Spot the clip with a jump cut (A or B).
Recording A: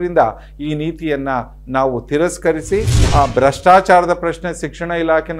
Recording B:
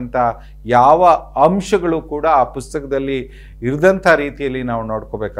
A